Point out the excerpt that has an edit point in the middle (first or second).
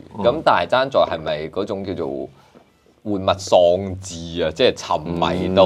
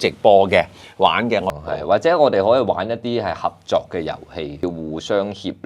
second